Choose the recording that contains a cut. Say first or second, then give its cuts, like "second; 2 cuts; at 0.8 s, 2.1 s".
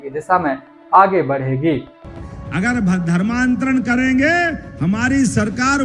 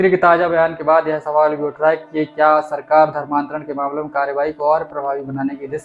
first; 1 cut; at 2.2 s